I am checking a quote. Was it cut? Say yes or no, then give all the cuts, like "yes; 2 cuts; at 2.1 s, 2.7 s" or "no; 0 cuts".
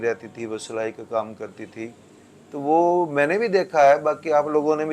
no; 0 cuts